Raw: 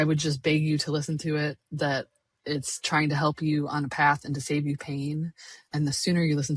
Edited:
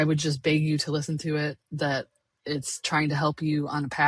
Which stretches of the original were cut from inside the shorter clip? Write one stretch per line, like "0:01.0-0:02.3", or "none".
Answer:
none

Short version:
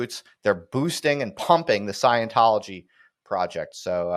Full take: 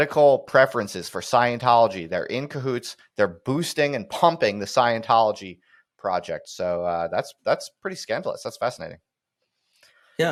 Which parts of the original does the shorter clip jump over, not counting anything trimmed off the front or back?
none

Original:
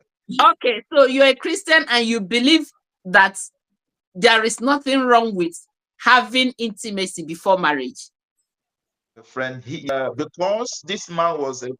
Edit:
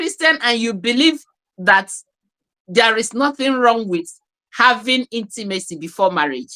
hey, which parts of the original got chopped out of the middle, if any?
none

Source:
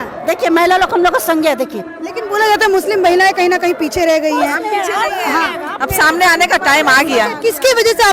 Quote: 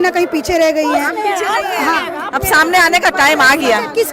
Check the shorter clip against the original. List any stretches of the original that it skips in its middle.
none

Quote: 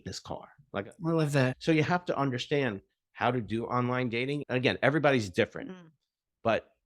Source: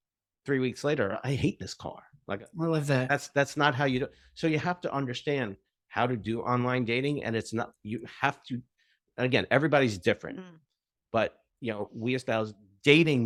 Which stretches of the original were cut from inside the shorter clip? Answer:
0:03.1-0:04.3
0:07.2-0:09.1

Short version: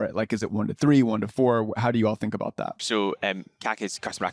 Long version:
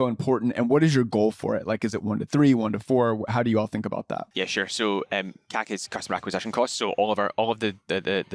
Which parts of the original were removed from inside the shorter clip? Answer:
0:04.3-0:04.7

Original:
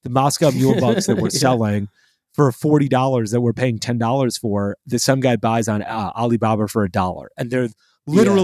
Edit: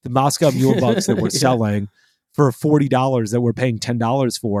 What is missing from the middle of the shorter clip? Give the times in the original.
none

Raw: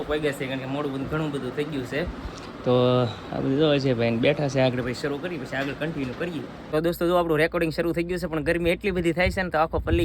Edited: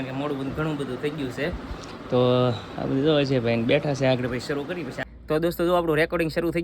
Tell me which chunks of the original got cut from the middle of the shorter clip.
0:05.6-0:06.4

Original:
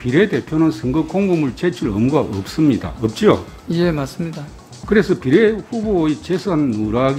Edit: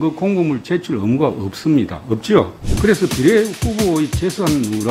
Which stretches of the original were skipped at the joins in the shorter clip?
0:03.5-0:04.7

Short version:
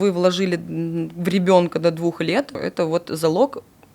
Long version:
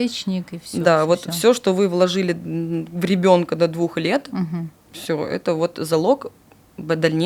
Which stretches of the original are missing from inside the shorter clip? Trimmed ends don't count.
0:04.3-0:05.2

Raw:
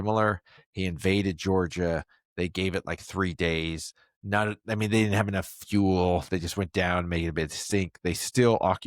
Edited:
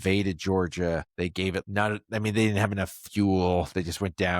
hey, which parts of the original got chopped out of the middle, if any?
0:02.2-0:03.8

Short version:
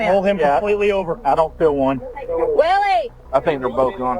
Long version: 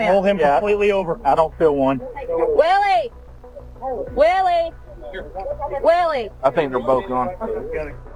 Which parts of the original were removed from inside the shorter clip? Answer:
0:03.2-0:06.3

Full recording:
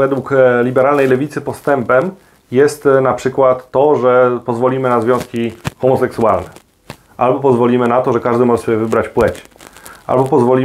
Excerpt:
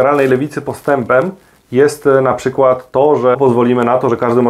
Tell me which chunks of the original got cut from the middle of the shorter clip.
0:04.1-0:07.4

